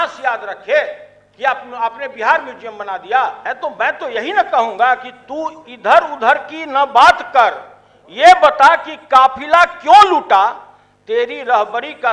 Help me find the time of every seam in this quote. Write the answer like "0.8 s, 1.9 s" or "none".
3.4 s